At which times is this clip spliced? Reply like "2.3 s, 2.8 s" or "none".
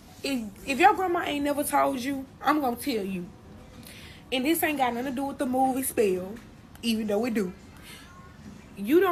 none

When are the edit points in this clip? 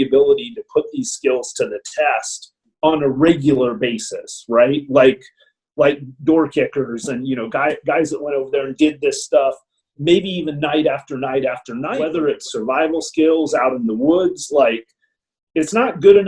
12.0 s

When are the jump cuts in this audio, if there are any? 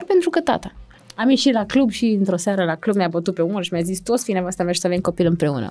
1.0 s

